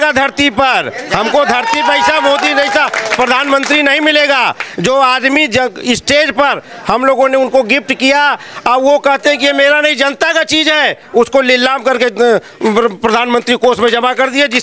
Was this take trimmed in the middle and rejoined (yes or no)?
no